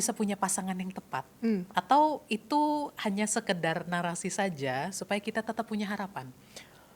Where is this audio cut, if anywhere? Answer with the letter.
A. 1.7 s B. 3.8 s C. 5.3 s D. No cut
A